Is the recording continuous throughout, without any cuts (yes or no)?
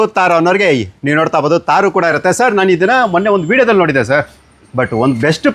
yes